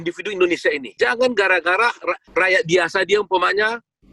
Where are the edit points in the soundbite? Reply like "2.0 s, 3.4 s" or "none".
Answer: 0.9 s, 2.2 s